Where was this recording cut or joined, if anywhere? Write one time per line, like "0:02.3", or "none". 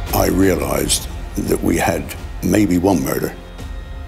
0:02.2